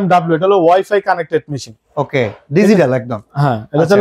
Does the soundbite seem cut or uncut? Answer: uncut